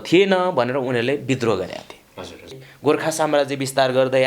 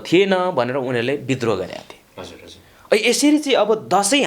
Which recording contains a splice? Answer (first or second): first